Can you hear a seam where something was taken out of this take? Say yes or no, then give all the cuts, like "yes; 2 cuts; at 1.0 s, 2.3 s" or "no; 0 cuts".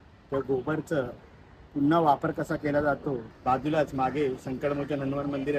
yes; 1 cut; at 3.3 s